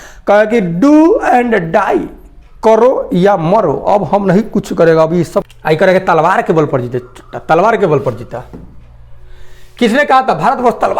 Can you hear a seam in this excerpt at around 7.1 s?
no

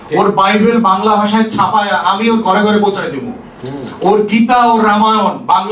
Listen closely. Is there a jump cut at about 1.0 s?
no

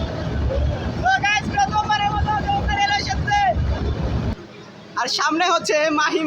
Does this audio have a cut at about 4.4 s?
yes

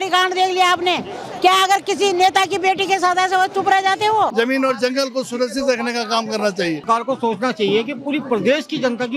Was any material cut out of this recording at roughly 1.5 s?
no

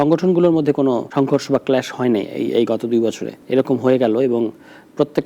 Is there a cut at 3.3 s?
yes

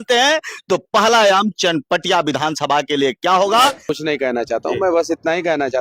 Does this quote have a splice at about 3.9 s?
yes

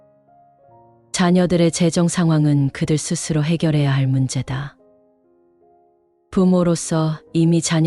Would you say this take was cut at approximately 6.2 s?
yes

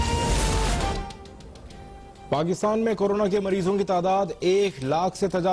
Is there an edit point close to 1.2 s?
no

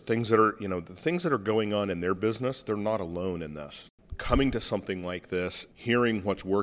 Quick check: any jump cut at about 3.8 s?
yes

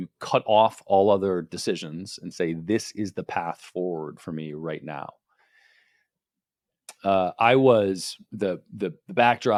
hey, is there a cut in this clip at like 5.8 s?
no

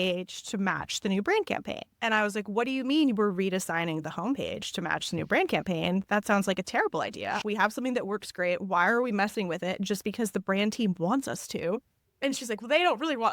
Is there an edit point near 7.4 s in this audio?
yes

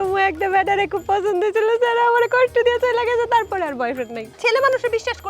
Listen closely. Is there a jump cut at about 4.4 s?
yes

